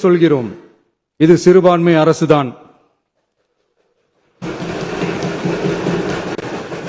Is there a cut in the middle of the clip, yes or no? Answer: no